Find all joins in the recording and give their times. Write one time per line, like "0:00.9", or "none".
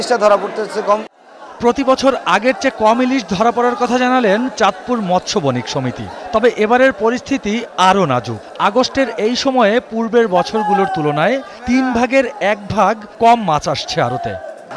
none